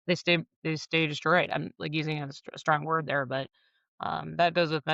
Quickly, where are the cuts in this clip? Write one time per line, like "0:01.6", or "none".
none